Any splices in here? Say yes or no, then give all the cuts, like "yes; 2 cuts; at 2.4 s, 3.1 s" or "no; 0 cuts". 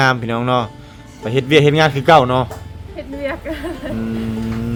no; 0 cuts